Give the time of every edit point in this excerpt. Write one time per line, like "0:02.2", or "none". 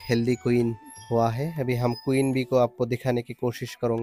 0:00.9